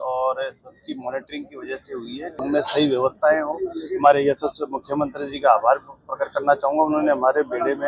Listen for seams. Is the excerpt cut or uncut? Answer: cut